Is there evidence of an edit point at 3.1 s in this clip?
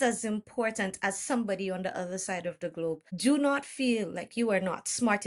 yes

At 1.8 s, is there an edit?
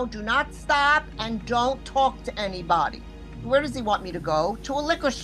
no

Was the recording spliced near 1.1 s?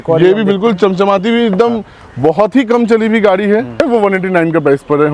no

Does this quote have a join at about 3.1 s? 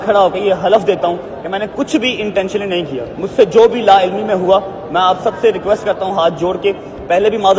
yes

